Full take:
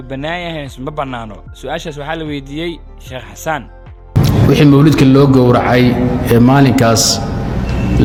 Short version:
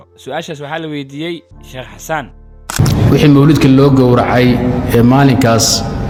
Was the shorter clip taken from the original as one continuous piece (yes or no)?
yes